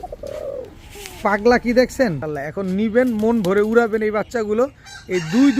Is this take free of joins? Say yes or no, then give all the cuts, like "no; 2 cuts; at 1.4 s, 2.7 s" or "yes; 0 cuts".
no; 1 cut; at 2.3 s